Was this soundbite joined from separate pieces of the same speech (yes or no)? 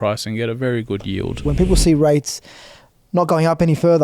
yes